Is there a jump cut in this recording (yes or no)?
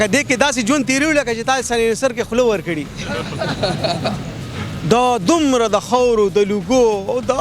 no